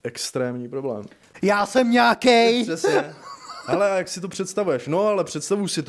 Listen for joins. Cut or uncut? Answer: cut